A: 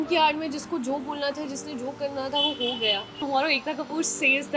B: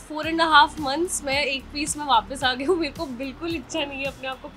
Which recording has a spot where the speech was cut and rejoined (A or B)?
A